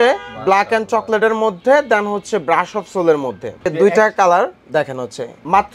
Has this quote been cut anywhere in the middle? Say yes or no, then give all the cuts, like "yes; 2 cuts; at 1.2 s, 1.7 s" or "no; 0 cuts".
yes; 1 cut; at 3.7 s